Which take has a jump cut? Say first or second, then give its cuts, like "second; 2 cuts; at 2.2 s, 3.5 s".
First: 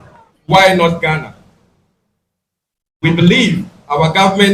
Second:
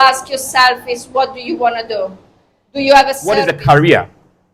second; 1 cut; at 3.2 s